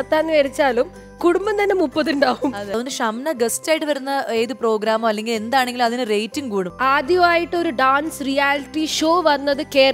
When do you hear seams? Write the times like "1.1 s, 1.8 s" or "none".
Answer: 2.7 s, 6.7 s